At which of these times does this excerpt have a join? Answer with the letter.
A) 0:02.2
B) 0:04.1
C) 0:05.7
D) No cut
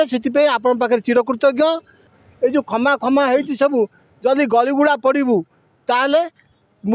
A